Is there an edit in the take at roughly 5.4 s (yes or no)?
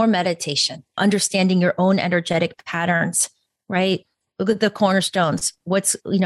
no